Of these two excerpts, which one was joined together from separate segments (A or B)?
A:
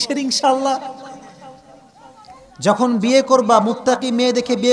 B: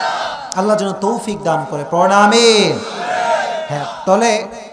B